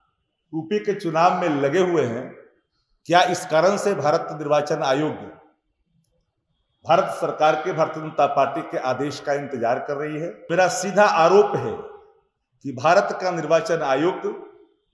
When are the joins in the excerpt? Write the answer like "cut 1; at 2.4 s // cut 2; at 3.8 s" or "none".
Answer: cut 1; at 10.5 s